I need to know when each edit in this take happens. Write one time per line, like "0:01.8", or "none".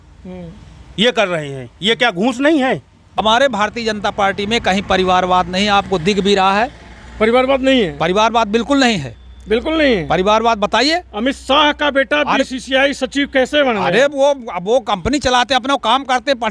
0:03.2